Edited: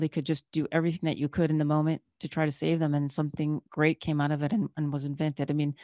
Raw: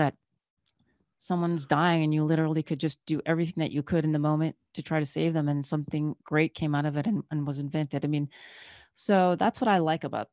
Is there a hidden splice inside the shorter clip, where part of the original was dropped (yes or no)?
no